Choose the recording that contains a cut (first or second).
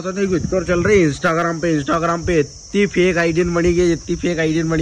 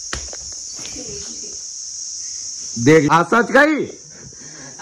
second